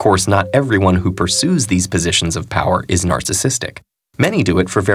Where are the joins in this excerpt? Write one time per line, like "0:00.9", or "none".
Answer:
0:01.7